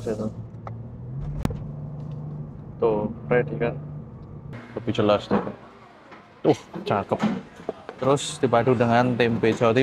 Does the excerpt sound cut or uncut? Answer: cut